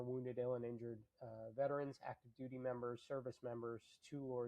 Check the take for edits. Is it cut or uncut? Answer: uncut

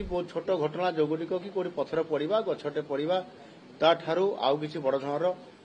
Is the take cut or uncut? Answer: uncut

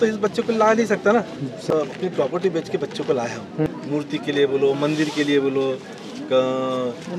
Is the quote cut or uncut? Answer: cut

